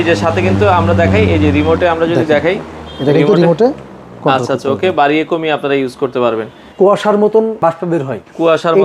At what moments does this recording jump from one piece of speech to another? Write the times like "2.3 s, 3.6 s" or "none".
6.6 s, 7.6 s